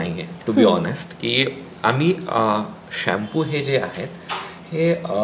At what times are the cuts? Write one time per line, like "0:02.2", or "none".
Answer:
none